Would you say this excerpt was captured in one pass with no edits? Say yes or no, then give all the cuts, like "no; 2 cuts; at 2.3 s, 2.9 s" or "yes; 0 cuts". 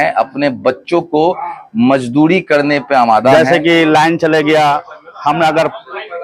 no; 1 cut; at 3.3 s